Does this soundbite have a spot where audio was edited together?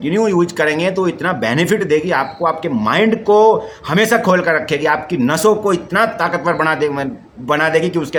no; 0 cuts

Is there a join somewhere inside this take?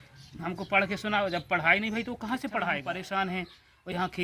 yes; 1 cut; at 2.8 s

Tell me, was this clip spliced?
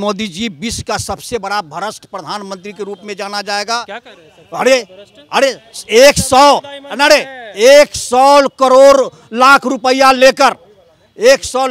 no; 0 cuts

